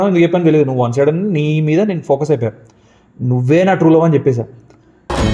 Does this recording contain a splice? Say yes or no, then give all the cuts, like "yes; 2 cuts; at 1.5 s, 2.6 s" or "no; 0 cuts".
no; 0 cuts